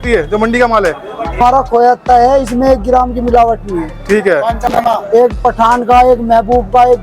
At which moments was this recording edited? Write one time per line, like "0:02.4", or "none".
0:01.4
0:04.7